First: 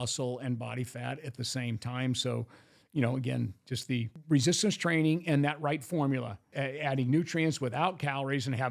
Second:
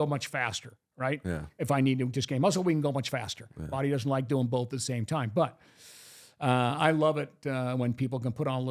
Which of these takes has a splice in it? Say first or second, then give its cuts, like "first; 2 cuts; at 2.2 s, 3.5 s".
first; 2 cuts; at 4.2 s, 6.5 s